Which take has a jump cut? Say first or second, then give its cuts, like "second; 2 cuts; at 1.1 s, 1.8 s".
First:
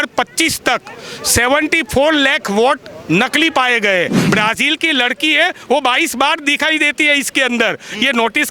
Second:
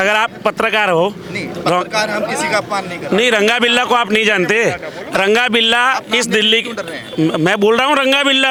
first; 1 cut; at 4.2 s